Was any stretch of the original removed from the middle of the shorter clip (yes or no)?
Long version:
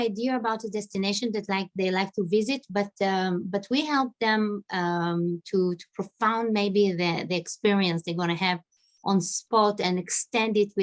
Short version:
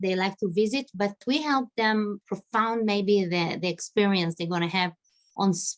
yes